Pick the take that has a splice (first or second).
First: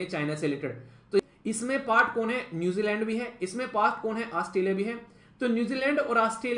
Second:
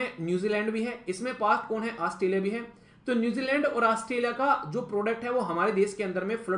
first